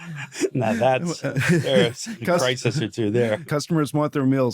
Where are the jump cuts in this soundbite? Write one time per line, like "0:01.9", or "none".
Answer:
0:03.4